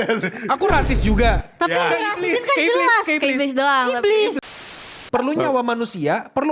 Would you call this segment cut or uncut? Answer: cut